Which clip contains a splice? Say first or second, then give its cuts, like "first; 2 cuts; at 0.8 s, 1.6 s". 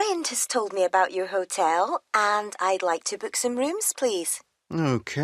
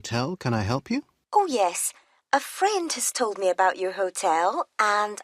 second; 1 cut; at 1.2 s